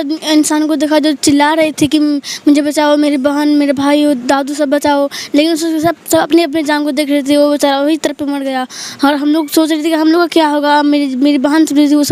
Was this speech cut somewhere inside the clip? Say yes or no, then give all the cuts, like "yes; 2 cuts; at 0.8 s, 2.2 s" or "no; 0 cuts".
no; 0 cuts